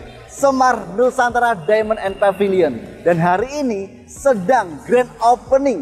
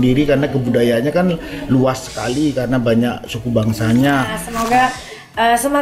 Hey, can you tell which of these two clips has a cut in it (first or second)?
second